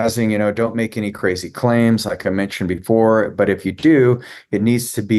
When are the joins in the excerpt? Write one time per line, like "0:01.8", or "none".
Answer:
none